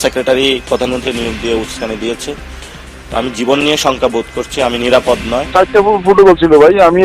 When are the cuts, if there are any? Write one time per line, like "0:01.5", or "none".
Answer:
0:05.5